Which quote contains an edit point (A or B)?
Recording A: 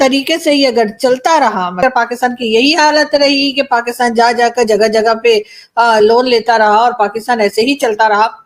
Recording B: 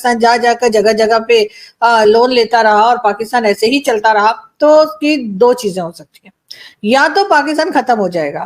A